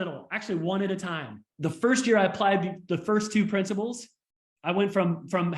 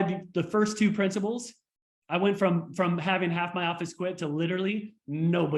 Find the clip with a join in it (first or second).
first